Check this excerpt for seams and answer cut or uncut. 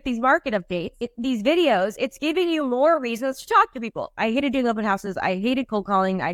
cut